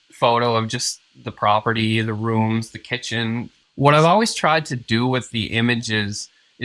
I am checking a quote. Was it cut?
yes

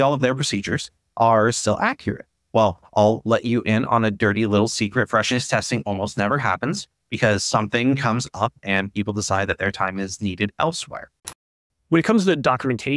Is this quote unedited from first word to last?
no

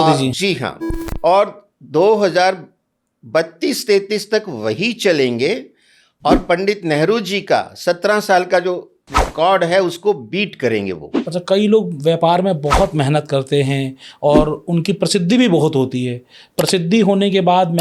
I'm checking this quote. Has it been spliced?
yes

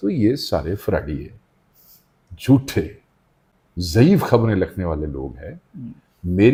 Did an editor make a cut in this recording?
no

